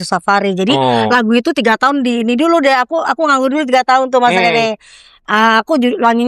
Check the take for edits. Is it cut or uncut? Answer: uncut